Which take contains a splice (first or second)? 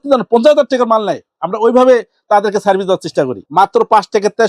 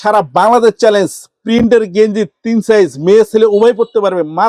first